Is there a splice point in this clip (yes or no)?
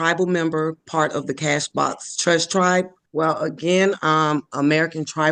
yes